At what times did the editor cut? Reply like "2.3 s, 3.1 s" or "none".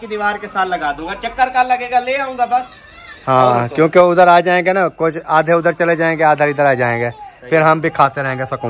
none